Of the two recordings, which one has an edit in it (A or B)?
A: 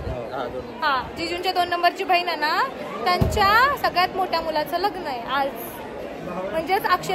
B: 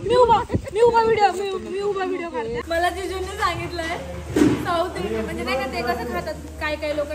B